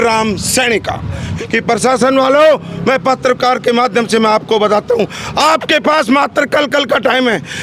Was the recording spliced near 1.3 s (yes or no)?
yes